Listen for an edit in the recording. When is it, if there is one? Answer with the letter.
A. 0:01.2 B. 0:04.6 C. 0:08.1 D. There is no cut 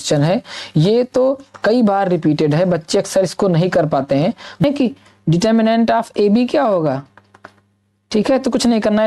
B